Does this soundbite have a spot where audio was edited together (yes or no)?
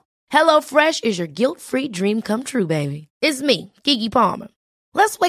no